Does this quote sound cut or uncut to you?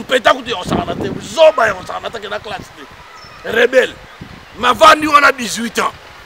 uncut